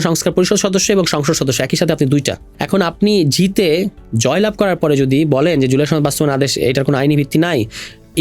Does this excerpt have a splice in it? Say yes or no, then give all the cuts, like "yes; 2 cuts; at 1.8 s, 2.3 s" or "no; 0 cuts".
yes; 1 cut; at 2.4 s